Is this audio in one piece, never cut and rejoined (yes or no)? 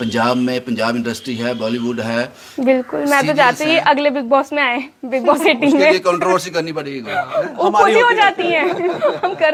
yes